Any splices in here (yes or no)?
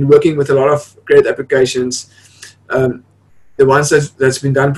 no